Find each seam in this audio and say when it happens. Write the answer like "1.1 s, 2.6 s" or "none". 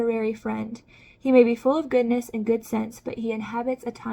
none